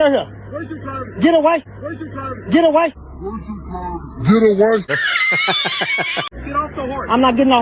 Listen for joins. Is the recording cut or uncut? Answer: cut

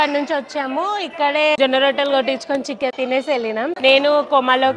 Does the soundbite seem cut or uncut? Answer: cut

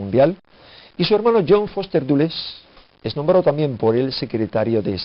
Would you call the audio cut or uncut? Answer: cut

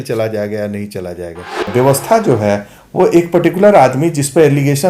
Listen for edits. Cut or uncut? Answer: cut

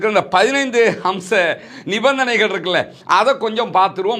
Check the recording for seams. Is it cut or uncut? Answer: uncut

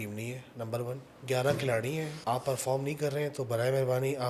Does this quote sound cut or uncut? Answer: cut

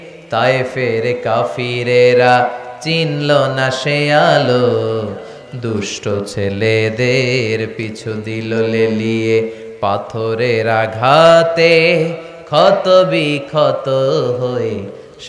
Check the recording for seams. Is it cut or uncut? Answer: uncut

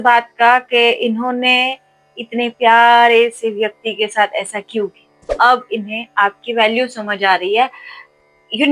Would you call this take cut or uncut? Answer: cut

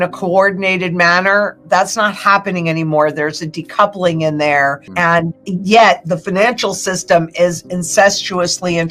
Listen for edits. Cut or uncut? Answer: cut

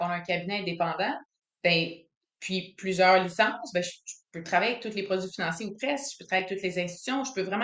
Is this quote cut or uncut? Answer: uncut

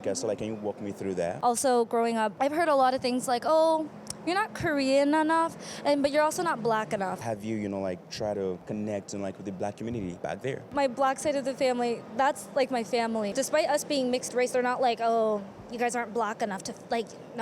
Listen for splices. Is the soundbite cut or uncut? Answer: cut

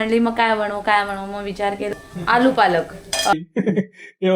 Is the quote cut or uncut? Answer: cut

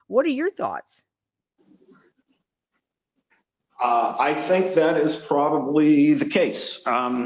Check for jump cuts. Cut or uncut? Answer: uncut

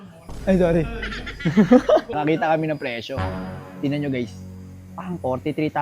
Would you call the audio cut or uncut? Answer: cut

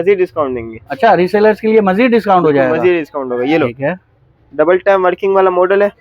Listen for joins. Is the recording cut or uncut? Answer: uncut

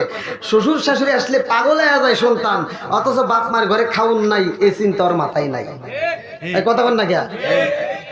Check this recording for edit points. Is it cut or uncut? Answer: uncut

